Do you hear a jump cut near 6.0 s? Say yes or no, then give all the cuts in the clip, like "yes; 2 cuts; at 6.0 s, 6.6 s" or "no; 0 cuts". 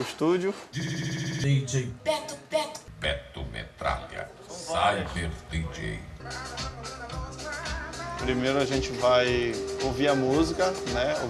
yes; 1 cut; at 6.0 s